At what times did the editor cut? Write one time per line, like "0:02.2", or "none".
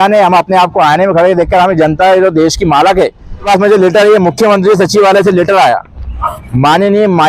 0:03.5